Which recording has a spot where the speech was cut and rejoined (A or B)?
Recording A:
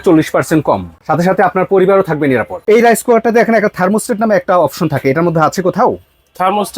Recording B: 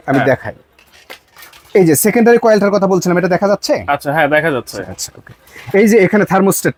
A